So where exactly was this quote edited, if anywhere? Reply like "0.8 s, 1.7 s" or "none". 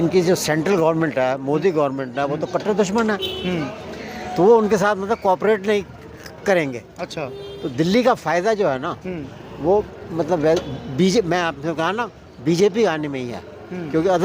none